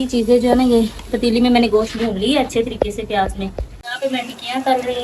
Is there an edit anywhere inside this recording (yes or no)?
yes